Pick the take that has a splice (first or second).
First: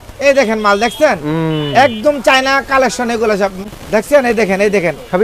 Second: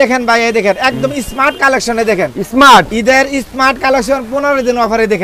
first